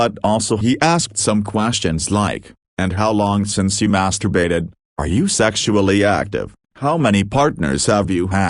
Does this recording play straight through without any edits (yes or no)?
yes